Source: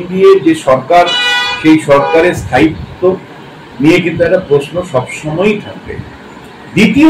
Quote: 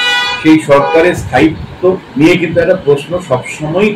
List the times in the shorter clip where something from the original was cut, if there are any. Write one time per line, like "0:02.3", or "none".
0:02.1

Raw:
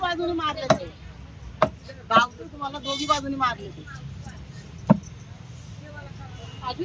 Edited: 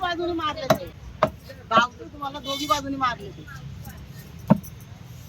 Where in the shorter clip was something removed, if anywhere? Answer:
0:01.0

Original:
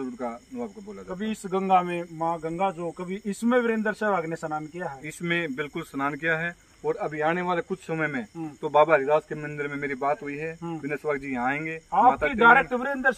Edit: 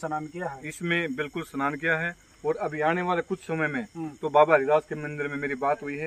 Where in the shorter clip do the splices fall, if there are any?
none

